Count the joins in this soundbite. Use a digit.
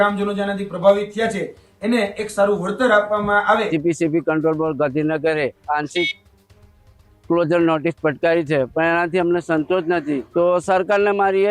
2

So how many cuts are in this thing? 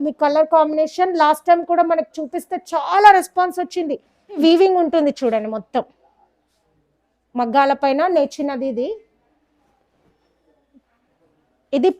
1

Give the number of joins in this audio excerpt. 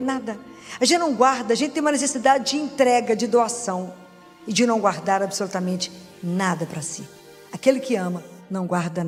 0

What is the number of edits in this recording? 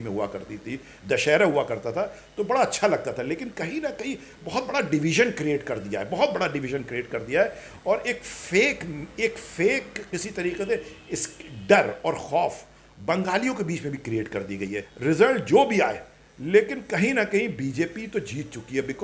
1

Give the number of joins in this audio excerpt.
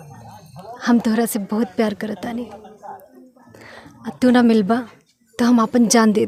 0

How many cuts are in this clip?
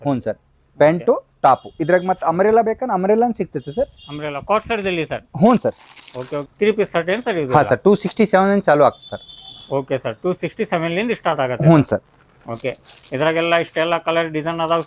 1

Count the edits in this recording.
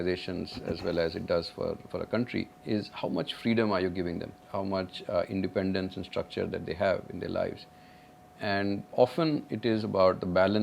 3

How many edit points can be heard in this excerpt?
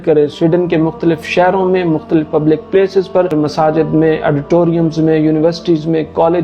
1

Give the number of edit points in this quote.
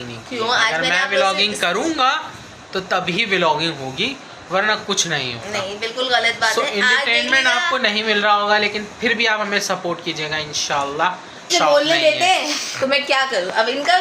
1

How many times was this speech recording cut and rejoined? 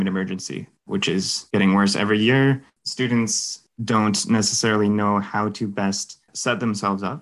1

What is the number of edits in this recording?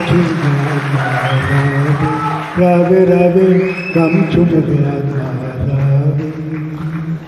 0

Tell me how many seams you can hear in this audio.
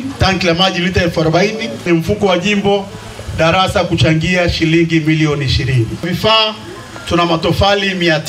2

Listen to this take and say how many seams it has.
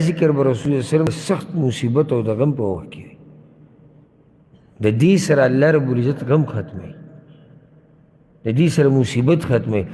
1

